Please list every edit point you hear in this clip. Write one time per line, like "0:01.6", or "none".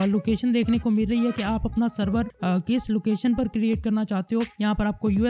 none

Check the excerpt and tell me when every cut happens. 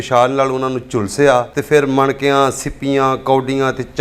0:01.5

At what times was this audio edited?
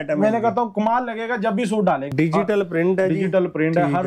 0:02.1

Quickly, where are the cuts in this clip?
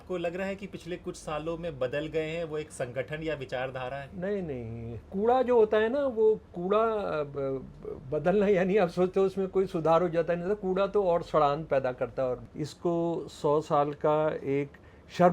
0:05.1
0:12.5

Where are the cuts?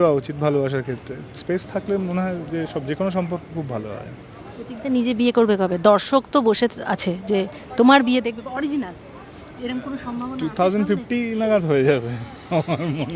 none

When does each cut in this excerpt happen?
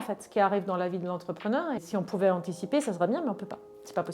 0:01.8

